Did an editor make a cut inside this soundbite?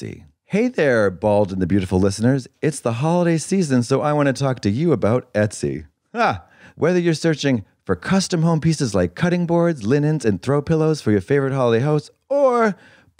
yes; 1 cut; at 6.6 s

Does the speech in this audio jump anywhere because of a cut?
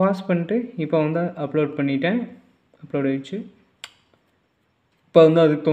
no; 0 cuts

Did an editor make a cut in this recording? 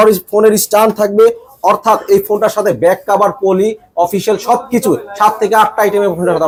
no; 0 cuts

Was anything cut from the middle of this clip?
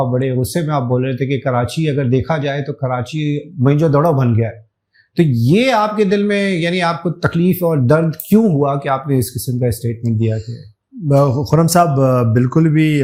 no; 0 cuts

